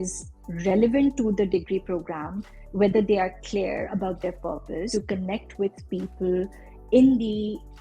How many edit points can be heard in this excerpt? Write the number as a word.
one